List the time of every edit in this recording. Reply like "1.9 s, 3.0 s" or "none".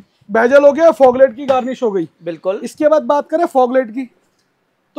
none